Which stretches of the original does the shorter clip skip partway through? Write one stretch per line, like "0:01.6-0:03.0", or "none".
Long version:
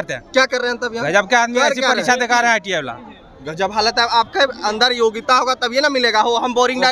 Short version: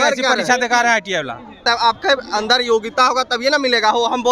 0:03.2-0:03.9